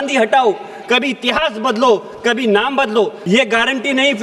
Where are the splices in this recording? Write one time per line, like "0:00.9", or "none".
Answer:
0:03.2